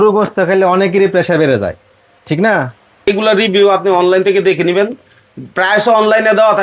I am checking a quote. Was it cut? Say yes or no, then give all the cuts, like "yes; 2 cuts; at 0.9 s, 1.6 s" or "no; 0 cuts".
yes; 1 cut; at 3.1 s